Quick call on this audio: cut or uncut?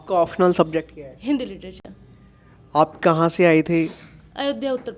uncut